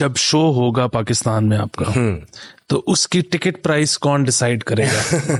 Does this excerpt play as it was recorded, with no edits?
yes; 0 cuts

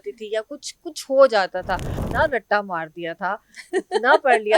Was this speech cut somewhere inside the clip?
yes; 1 cut; at 2.0 s

